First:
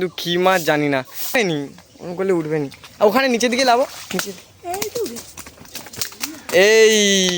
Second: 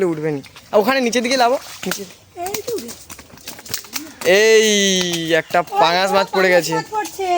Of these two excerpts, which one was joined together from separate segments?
first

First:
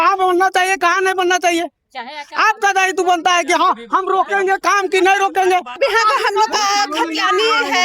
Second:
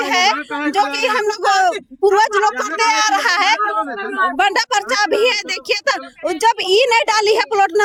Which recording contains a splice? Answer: first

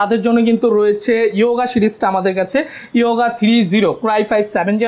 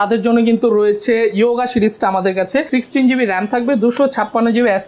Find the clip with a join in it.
second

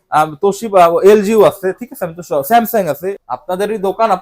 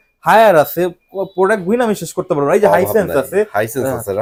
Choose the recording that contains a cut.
first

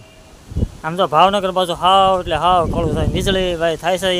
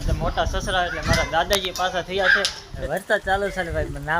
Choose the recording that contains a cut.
second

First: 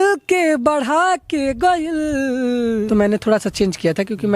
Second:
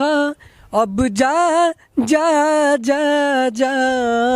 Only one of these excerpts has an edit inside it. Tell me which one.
first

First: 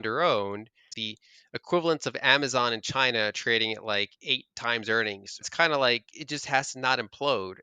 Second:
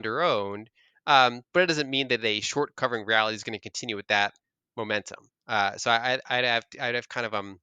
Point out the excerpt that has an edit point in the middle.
first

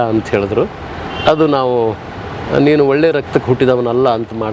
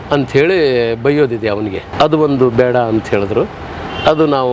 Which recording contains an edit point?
second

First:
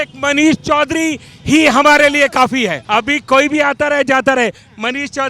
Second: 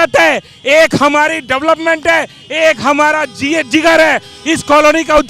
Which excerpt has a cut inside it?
first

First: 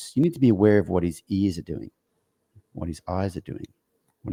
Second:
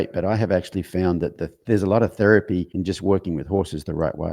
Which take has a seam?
second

